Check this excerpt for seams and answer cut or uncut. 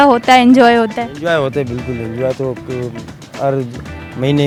uncut